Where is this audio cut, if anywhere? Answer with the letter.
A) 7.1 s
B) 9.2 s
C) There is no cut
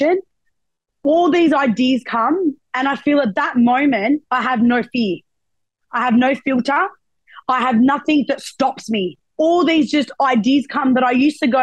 B